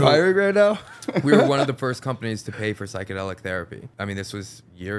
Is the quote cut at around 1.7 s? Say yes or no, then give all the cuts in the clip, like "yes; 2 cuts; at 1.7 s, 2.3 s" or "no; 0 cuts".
no; 1 cut; at 3.8 s